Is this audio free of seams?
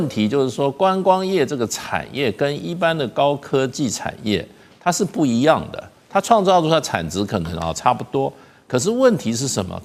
yes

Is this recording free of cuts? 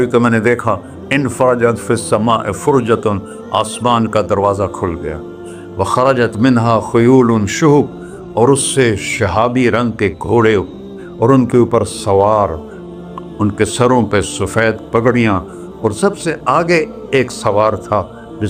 yes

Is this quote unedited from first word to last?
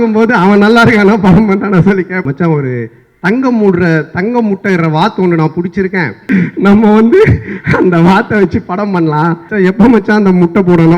no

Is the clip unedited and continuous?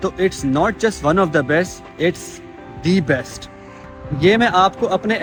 yes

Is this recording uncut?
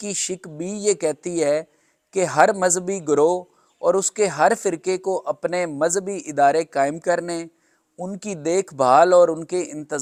yes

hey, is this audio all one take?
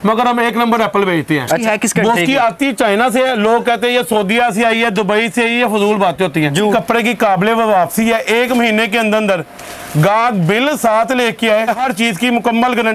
no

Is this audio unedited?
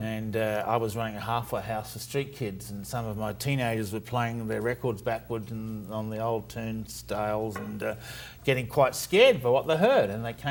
yes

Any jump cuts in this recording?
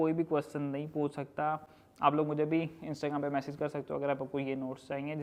no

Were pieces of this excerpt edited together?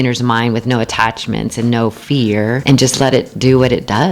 yes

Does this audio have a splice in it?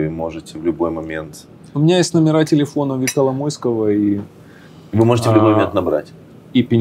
no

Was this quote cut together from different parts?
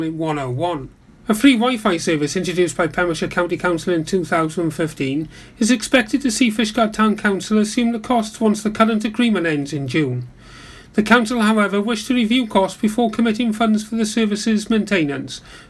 yes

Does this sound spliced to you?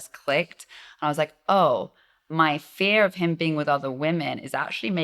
no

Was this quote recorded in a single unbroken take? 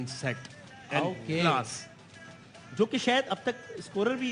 yes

